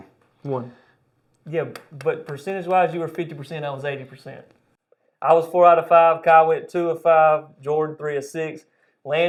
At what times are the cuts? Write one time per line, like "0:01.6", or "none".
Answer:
none